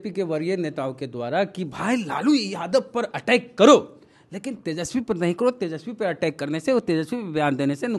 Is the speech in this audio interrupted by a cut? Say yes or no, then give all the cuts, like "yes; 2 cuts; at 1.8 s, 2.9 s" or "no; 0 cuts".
no; 0 cuts